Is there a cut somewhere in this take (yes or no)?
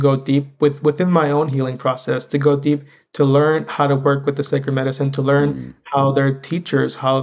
no